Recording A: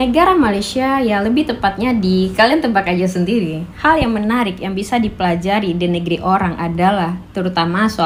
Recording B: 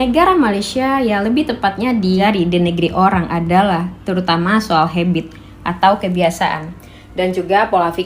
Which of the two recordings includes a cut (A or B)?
B